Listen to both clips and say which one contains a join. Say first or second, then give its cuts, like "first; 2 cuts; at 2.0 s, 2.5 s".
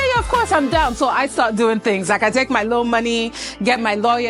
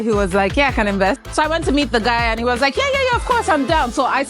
second; 1 cut; at 1.2 s